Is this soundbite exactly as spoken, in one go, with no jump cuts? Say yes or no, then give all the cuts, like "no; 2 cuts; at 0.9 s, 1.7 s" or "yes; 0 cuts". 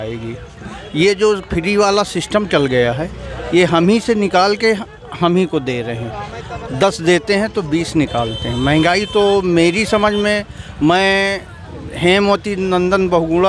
yes; 0 cuts